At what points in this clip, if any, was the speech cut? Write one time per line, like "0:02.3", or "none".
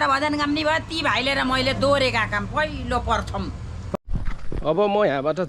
0:04.0